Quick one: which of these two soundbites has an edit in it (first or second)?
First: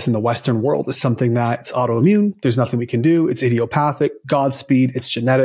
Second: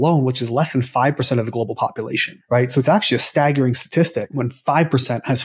second